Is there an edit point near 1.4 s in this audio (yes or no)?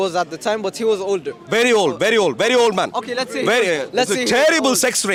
no